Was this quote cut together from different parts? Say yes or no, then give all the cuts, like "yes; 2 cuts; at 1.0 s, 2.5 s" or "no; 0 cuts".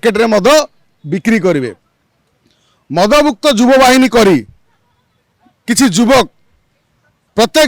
no; 0 cuts